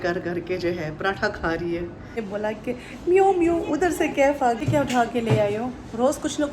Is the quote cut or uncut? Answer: cut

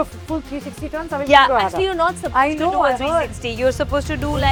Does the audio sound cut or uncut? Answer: uncut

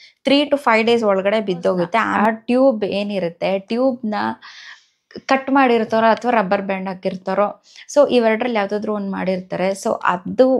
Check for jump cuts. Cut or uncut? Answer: cut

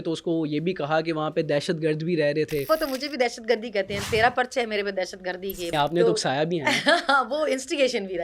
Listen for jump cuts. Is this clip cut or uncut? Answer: cut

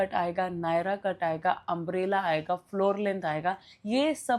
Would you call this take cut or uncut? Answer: uncut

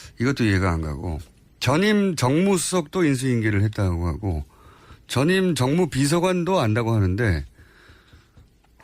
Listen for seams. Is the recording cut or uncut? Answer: cut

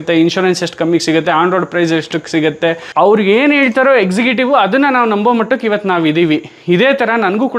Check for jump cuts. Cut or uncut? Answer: cut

